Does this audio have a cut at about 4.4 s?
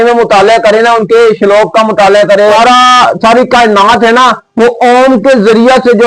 no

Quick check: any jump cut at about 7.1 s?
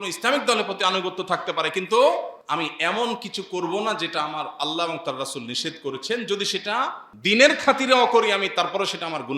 yes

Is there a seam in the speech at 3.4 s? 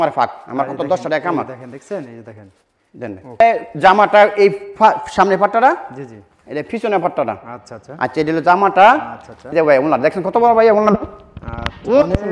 yes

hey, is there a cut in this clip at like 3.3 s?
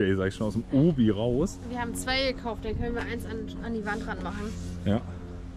no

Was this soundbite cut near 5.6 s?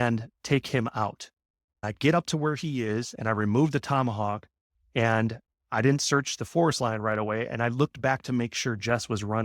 yes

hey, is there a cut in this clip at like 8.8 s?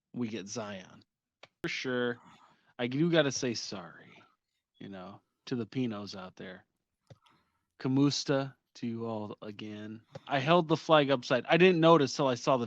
no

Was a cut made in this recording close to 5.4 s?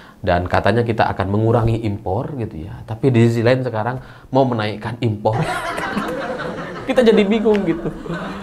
yes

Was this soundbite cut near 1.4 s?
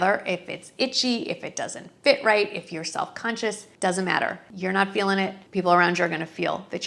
no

